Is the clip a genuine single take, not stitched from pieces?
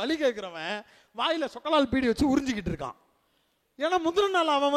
yes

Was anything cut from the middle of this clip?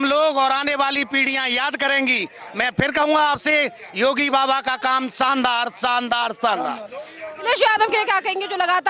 no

